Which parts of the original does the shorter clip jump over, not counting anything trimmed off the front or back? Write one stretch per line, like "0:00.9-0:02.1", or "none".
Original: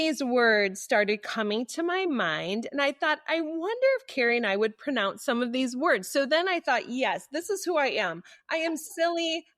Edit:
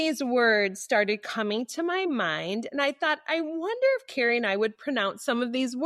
none